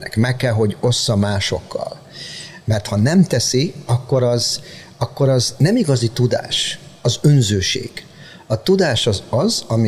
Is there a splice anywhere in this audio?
no; 0 cuts

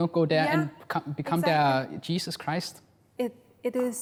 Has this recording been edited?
no; 0 cuts

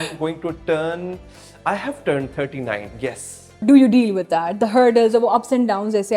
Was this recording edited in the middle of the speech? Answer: yes; 1 cut; at 3.6 s

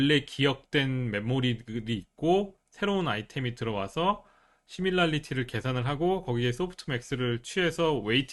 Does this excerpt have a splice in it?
no; 0 cuts

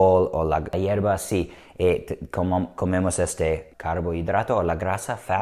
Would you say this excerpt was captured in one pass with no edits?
no; 2 cuts; at 0.7 s, 3.7 s

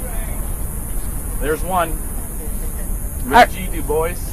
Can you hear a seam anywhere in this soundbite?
yes; 1 cut; at 3.4 s

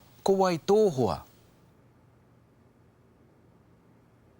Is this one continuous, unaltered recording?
no; 1 cut; at 1.3 s

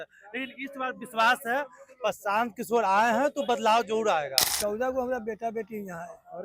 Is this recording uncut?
no; 1 cut; at 4.4 s

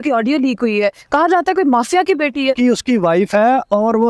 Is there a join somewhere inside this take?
yes; 1 cut; at 2.6 s

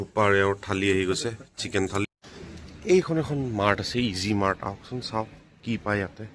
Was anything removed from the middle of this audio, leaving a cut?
yes; 1 cut; at 2.0 s

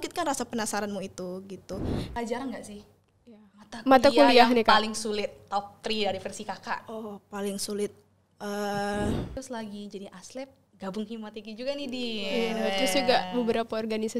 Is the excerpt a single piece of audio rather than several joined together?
no; 2 cuts; at 2.0 s, 9.3 s

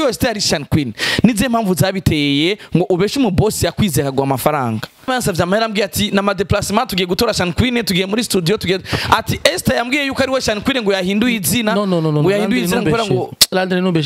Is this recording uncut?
no; 1 cut; at 5.1 s

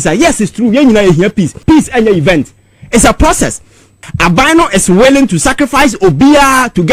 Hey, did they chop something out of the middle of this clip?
yes; 2 cuts; at 1.6 s, 4.0 s

